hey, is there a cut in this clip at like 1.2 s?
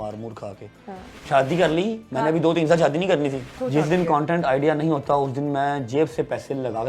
yes; 2 cuts; at 1.2 s, 3.6 s

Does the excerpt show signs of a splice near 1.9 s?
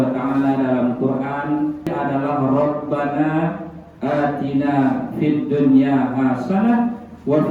yes; 1 cut; at 1.9 s

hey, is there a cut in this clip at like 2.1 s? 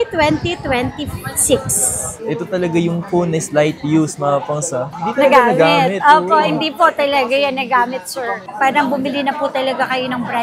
yes; 2 cuts; at 2.1 s, 8.4 s

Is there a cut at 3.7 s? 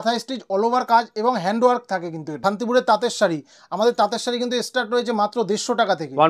no; 1 cut; at 2.4 s

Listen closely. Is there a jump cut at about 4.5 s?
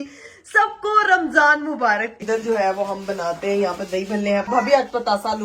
yes; 2 cuts; at 2.1 s, 4.5 s

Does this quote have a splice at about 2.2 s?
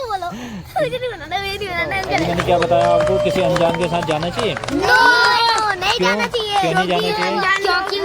yes; 1 cut; at 2.2 s

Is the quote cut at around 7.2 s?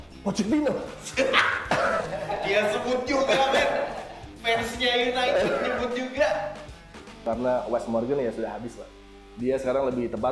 yes; 1 cut; at 7.2 s

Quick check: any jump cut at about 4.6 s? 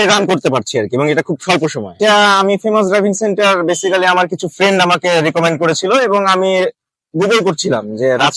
no; 1 cut; at 2.0 s

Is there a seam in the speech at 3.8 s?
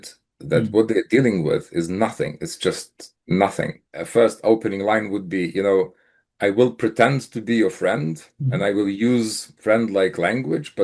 yes; 1 cut; at 3.8 s

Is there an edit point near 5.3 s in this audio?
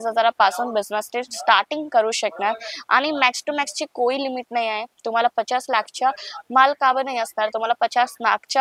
no; 0 cuts

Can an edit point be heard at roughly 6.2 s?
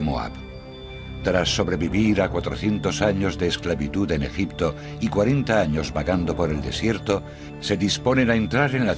yes; 1 cut; at 6.2 s

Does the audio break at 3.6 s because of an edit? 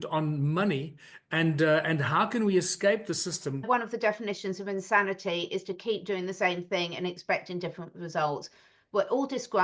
yes; 1 cut; at 3.6 s

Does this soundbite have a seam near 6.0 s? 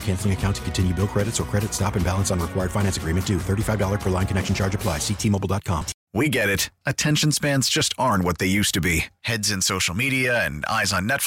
yes; 1 cut; at 6.0 s

